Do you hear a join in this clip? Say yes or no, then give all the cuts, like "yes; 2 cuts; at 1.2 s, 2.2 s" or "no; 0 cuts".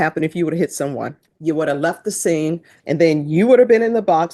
yes; 2 cuts; at 1.3 s, 2.7 s